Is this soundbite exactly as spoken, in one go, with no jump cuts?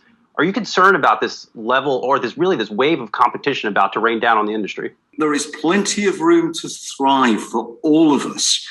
no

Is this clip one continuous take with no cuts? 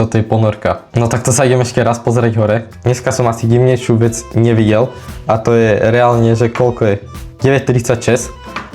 yes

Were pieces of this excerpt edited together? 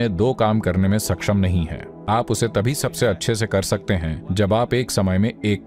no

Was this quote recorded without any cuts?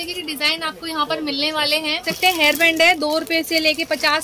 no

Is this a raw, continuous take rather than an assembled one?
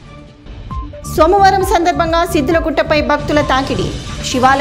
no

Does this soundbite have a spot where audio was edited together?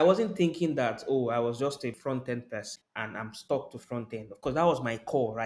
yes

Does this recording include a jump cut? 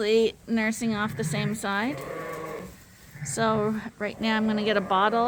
no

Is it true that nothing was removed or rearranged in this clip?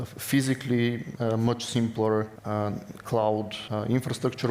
no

